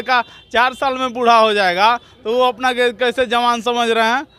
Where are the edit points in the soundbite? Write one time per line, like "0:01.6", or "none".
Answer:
none